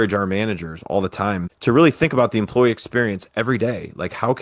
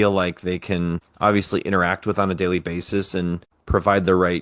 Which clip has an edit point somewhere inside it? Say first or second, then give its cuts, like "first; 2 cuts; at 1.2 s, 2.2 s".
second; 2 cuts; at 1.1 s, 3.5 s